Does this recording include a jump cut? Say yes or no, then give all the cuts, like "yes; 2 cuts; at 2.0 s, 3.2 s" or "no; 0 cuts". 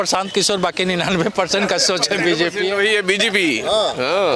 no; 0 cuts